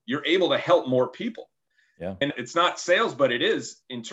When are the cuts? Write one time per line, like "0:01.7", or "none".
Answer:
0:02.3